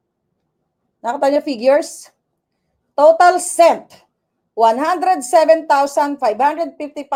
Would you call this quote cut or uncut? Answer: uncut